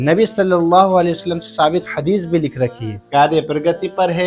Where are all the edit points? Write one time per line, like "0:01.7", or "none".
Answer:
0:03.0